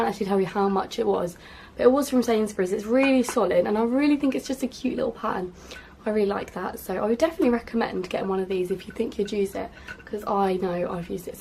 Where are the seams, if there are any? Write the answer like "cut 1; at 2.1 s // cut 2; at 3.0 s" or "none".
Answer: none